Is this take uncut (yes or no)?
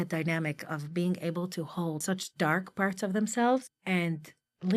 no